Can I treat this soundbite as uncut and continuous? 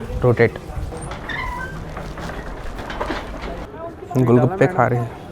no; 2 cuts; at 0.9 s, 3.7 s

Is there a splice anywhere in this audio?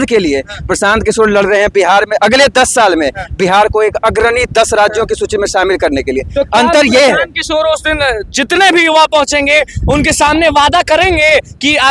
no; 0 cuts

